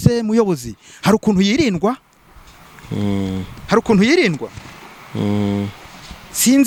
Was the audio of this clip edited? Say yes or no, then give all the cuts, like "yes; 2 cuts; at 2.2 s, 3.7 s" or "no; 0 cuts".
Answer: no; 0 cuts